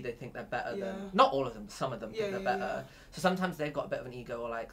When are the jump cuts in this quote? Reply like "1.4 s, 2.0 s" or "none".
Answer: none